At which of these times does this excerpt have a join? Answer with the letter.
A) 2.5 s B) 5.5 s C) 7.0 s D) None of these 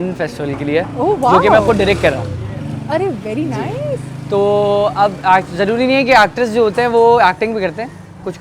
D